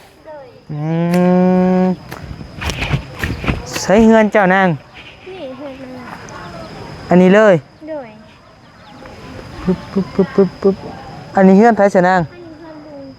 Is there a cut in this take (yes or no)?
no